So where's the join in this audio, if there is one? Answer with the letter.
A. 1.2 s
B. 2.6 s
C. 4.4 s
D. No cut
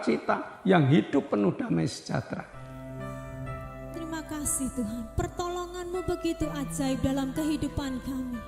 B